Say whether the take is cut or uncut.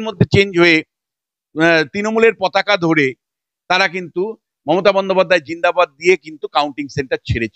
uncut